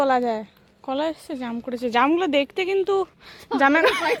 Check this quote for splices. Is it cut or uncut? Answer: uncut